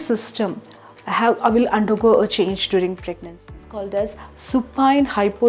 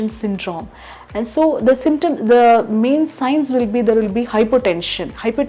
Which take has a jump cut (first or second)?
first